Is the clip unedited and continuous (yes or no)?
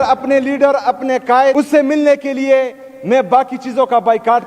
no